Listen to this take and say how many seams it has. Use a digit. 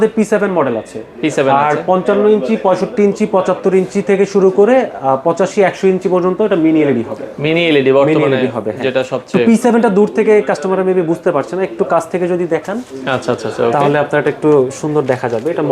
0